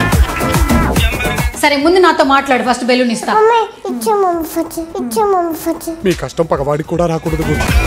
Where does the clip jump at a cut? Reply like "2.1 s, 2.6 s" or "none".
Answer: 1.5 s